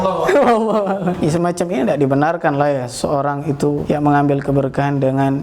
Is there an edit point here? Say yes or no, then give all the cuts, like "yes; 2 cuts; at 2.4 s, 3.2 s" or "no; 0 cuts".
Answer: yes; 2 cuts; at 1.2 s, 3.8 s